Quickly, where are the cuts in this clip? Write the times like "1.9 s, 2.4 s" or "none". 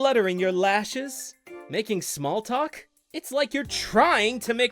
1.4 s, 3.0 s